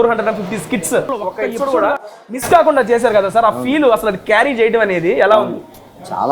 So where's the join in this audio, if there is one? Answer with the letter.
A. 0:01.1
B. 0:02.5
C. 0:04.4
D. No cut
A